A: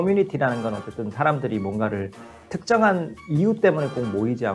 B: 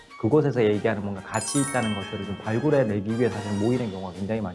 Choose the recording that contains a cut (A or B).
A